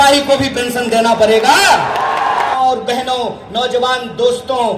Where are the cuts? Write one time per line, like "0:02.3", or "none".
0:02.5